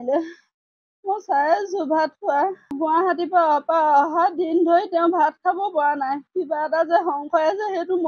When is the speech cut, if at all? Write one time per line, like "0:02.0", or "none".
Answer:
0:02.7